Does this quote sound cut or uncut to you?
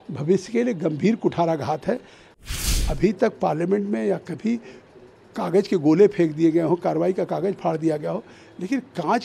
cut